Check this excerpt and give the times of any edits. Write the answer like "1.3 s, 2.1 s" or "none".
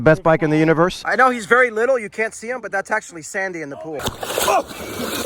1.0 s, 4.0 s